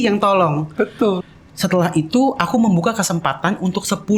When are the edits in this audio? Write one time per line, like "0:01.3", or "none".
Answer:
0:01.2